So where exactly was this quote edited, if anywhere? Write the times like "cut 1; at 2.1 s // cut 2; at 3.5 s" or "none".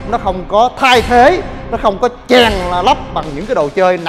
none